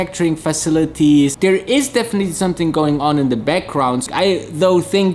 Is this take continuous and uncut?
no; 2 cuts; at 1.3 s, 4.1 s

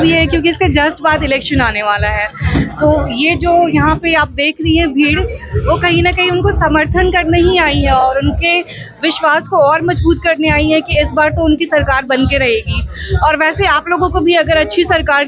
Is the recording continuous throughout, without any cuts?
yes; 0 cuts

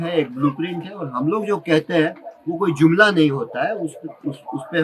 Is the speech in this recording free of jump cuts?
yes; 0 cuts

